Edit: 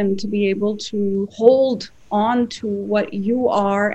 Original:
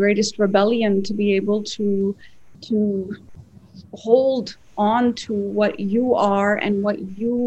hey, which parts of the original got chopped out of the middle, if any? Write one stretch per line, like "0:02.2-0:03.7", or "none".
0:02.2-0:04.0